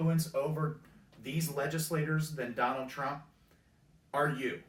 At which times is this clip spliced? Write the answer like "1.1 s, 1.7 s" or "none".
none